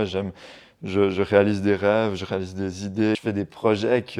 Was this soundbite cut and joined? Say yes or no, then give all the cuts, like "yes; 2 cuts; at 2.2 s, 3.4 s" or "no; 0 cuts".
yes; 1 cut; at 3.2 s